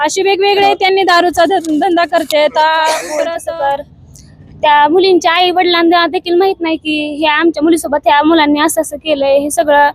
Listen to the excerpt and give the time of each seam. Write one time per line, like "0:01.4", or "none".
0:03.3